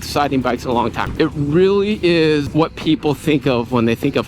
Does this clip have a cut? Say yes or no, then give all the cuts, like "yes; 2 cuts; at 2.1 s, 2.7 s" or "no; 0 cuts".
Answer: yes; 2 cuts; at 1.0 s, 2.5 s